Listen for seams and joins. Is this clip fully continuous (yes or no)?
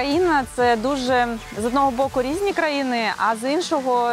yes